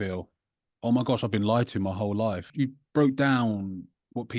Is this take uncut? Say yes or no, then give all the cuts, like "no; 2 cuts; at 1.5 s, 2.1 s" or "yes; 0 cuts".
no; 1 cut; at 2.5 s